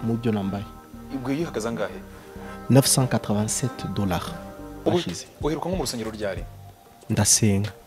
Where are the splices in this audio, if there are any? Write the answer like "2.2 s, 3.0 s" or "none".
4.7 s